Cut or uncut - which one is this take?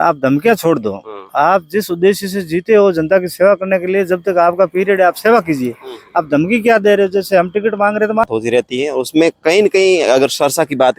cut